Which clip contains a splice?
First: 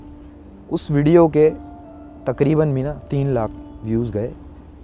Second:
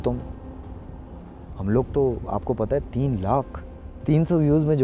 second; 1 cut; at 3.9 s

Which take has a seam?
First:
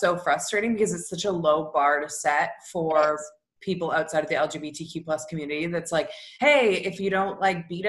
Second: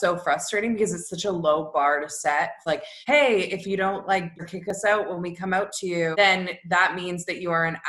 second; 3 cuts; at 2.7 s, 4.5 s, 6.1 s

